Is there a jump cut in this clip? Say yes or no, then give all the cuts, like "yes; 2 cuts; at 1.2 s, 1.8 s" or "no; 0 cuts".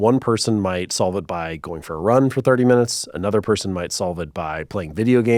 no; 0 cuts